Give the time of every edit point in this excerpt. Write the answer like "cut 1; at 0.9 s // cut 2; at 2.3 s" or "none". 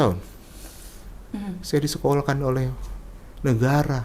cut 1; at 1.2 s